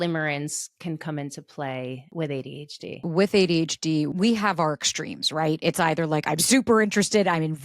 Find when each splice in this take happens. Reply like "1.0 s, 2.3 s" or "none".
2.1 s, 3.0 s, 4.1 s